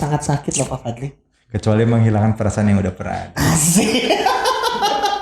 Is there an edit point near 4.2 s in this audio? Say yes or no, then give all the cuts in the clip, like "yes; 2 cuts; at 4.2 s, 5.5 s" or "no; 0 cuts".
no; 1 cut; at 1.2 s